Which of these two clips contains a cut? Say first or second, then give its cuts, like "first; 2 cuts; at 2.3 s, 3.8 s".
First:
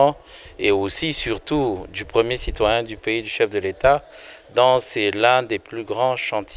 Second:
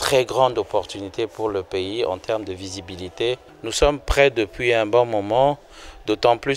second; 1 cut; at 3.5 s